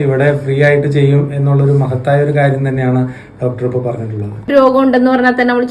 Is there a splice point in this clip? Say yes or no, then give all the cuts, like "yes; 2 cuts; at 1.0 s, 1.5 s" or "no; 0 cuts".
yes; 1 cut; at 4.5 s